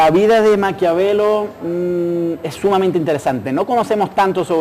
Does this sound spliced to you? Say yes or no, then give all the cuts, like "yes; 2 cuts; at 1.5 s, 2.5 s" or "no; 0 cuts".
no; 0 cuts